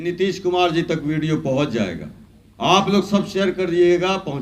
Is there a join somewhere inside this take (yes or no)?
no